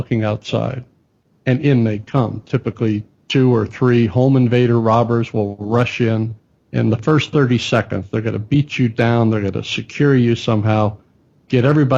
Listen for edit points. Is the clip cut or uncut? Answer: uncut